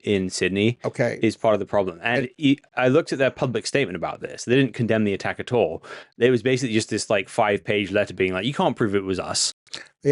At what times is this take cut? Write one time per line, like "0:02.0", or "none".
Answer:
none